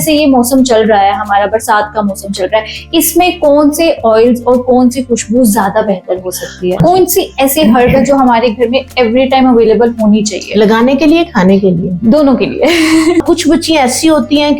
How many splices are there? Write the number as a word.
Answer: two